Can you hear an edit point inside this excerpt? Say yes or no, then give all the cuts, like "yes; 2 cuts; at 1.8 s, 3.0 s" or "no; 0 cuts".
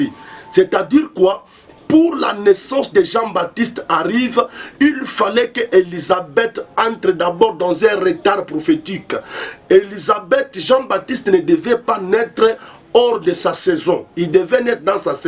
no; 0 cuts